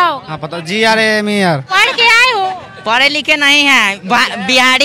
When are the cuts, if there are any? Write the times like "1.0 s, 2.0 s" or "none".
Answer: 1.7 s